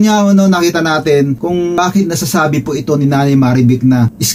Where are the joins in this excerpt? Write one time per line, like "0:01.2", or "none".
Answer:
0:01.8

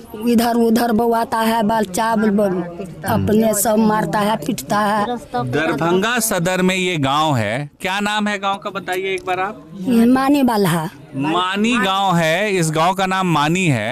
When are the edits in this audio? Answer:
none

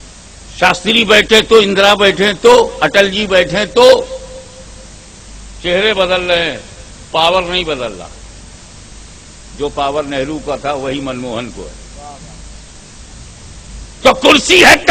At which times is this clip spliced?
none

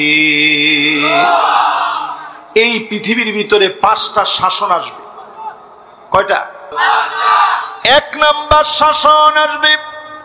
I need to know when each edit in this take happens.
0:06.7

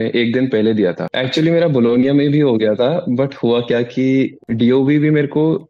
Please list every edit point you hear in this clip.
0:01.1
0:04.4

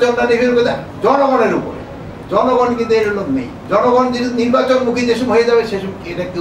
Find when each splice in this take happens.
0:03.5

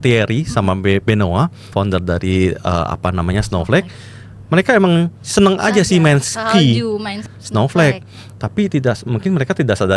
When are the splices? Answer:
0:01.7
0:07.3

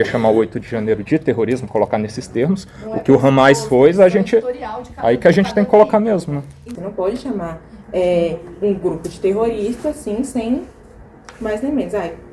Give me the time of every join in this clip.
0:06.7

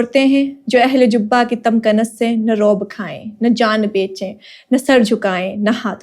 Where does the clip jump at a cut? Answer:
none

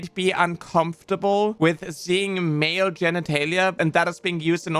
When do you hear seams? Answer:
0:01.5
0:03.7

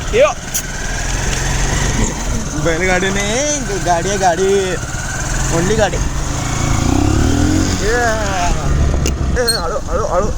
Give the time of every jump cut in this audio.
0:09.4

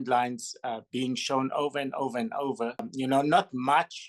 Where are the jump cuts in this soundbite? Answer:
0:02.9

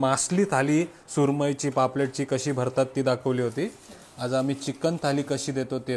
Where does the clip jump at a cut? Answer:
none

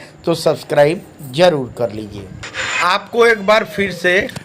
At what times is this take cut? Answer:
0:02.8

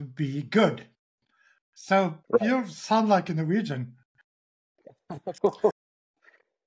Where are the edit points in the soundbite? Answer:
0:05.8

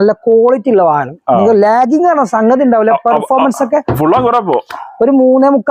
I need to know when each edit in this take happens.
none

